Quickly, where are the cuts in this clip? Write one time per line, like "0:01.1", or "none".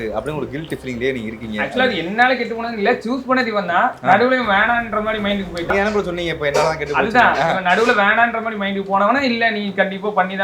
0:05.7